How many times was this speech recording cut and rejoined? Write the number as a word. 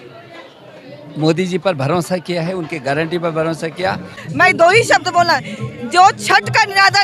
one